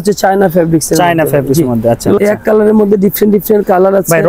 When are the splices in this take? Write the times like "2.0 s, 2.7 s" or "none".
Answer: 2.2 s